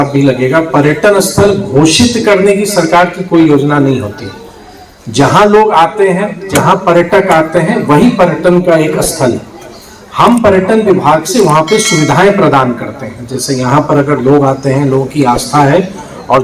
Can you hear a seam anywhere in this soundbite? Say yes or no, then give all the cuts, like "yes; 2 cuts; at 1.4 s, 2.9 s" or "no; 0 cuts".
no; 0 cuts